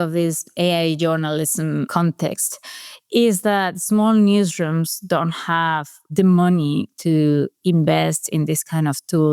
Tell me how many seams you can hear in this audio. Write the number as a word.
two